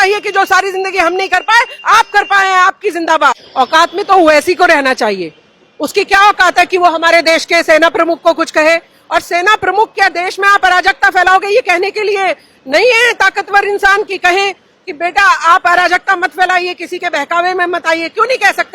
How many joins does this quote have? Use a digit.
1